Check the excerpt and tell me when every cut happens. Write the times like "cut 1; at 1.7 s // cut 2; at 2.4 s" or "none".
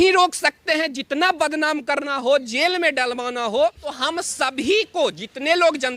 cut 1; at 3.9 s